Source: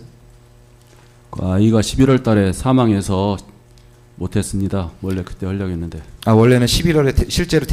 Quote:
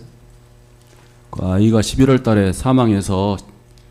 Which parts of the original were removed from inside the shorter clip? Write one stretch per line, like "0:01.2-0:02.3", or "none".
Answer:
none